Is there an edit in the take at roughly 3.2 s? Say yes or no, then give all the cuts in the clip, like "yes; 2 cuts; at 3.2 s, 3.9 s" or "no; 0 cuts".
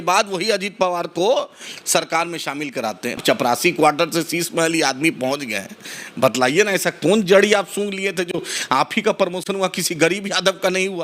yes; 1 cut; at 3.2 s